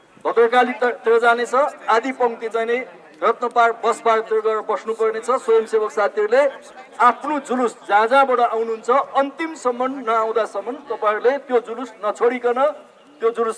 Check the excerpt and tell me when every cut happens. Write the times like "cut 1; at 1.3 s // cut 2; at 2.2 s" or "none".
none